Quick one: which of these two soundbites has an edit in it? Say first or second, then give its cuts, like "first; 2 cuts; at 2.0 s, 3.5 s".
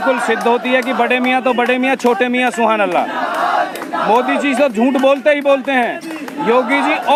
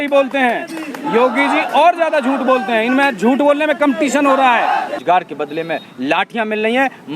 second; 1 cut; at 5.0 s